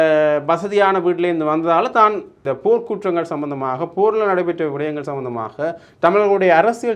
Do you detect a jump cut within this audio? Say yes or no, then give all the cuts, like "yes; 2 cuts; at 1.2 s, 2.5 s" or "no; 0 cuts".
yes; 1 cut; at 2.5 s